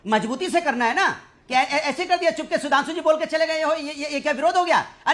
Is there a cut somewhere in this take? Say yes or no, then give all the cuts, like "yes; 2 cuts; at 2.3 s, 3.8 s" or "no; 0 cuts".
no; 0 cuts